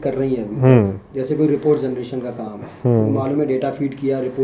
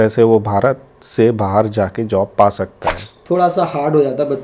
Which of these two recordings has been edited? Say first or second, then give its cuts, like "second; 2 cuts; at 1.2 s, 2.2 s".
second; 1 cut; at 3.1 s